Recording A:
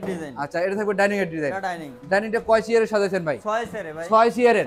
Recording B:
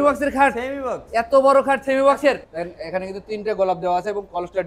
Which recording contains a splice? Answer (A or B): B